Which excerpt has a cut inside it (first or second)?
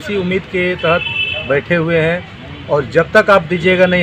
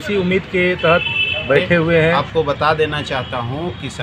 second